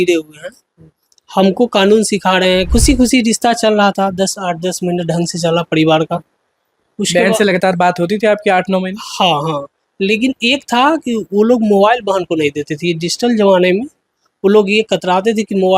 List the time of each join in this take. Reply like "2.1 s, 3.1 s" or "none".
2.7 s

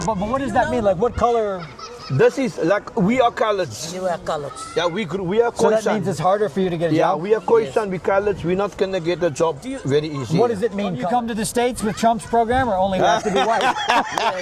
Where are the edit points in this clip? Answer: 11.0 s

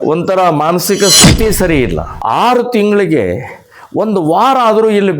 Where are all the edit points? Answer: 2.1 s

